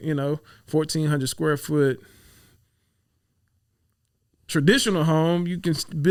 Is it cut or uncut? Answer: uncut